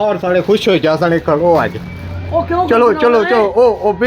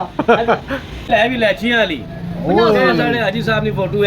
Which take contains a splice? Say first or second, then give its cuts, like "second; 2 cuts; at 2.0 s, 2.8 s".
second; 1 cut; at 1.1 s